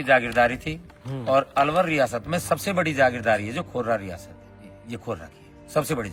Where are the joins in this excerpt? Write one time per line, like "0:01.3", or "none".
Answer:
none